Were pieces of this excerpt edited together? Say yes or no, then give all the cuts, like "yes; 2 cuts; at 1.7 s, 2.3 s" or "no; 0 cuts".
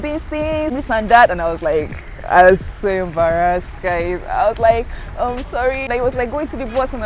yes; 2 cuts; at 0.7 s, 5.9 s